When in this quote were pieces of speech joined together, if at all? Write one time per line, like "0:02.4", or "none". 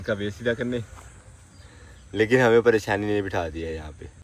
none